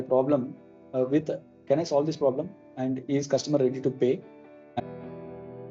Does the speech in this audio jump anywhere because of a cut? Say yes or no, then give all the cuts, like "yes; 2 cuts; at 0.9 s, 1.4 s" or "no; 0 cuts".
yes; 1 cut; at 4.8 s